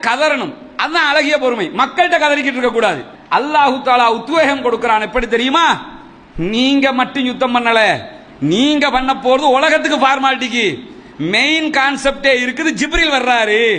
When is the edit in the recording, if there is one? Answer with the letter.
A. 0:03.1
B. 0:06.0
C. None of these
A